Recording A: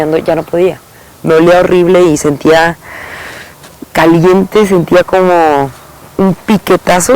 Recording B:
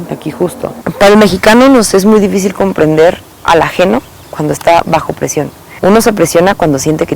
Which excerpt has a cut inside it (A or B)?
B